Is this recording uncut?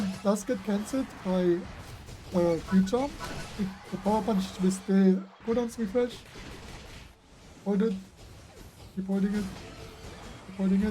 no; 1 cut; at 5.3 s

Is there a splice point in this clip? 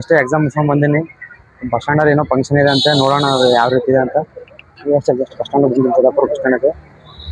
no; 0 cuts

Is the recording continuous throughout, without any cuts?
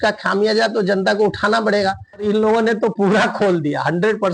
no; 1 cut; at 2.2 s

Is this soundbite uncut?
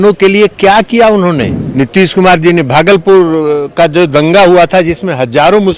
no; 1 cut; at 1.6 s

